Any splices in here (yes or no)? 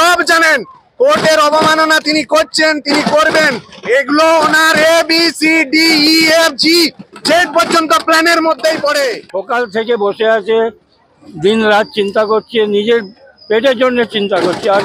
yes